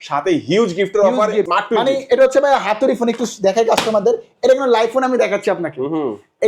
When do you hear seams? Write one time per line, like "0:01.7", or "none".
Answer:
0:01.5